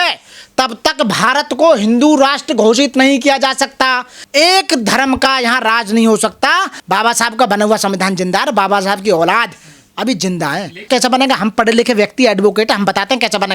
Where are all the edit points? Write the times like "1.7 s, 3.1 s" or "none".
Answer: 6.7 s, 10.8 s